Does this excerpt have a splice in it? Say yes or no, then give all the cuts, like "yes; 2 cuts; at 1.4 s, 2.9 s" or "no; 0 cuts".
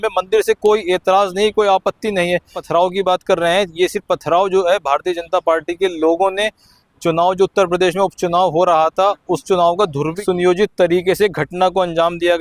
yes; 2 cuts; at 2.6 s, 10.2 s